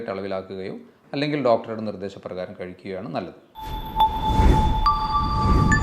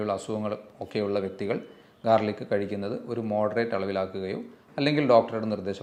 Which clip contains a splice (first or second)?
first